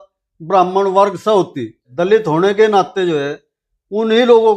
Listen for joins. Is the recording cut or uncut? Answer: cut